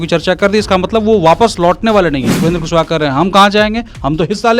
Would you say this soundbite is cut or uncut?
cut